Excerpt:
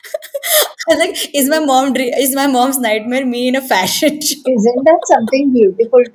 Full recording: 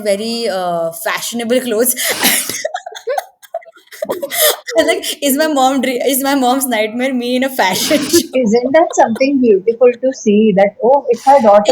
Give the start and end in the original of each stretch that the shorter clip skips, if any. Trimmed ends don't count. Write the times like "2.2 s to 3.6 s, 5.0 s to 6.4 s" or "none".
none

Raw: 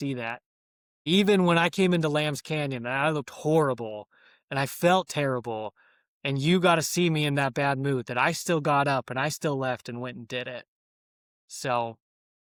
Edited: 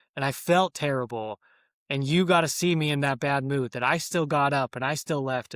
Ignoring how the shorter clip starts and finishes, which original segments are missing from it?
none

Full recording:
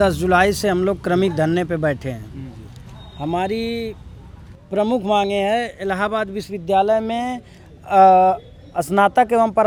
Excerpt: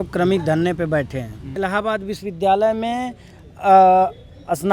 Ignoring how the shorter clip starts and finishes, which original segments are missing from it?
2.4 s to 5.7 s

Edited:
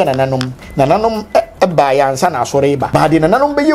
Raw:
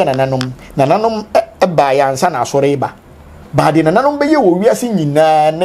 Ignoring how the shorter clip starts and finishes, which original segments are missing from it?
2.8 s to 3.5 s

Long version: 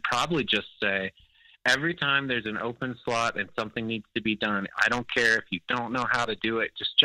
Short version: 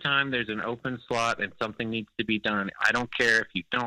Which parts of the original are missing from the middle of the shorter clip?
none

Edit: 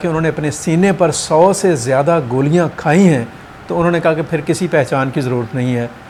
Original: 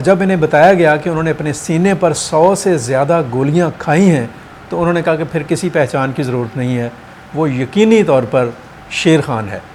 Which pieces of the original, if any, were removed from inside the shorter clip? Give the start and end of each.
none

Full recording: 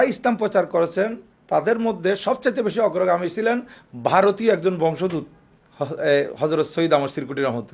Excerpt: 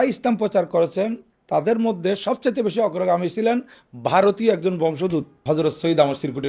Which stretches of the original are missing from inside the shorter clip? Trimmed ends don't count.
5.4 s to 6.3 s

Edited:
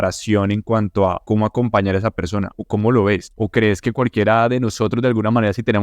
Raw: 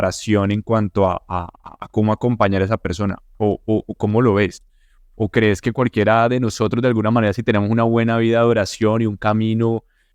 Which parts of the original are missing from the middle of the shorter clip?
1.2 s to 1.9 s, 3.3 s to 3.9 s, 4.6 s to 5.1 s

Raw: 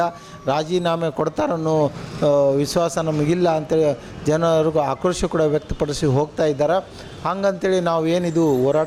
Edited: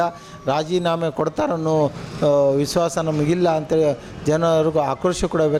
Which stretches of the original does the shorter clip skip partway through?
none

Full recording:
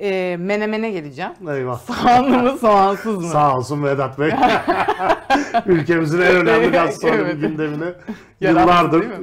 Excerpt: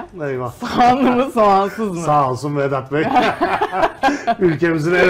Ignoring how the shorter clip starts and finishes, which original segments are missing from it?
none

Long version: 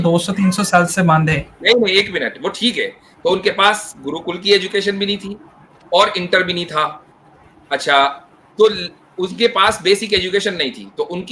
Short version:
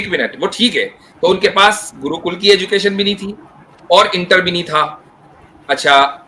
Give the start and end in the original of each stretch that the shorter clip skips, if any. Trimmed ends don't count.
none

